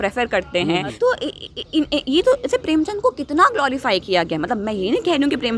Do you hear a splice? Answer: yes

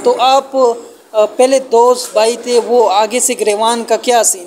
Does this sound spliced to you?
no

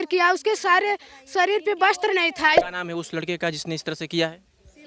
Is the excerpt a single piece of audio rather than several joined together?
no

